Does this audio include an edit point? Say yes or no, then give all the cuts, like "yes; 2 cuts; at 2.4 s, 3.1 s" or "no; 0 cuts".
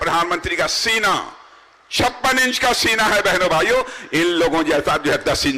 no; 0 cuts